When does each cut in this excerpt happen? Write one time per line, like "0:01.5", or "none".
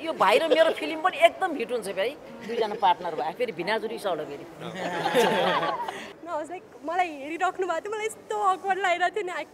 0:06.1